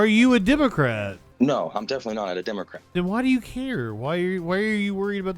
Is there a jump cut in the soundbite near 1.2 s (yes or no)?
yes